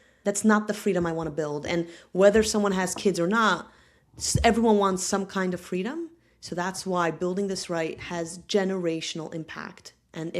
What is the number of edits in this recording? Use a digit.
0